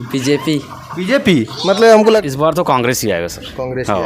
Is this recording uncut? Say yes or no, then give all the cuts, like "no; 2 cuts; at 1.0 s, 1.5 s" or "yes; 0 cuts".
no; 1 cut; at 2.2 s